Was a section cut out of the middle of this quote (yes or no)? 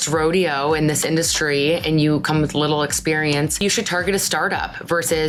no